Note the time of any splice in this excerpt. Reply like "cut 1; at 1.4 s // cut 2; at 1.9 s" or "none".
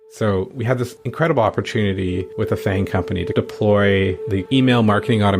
cut 1; at 1.0 s // cut 2; at 2.3 s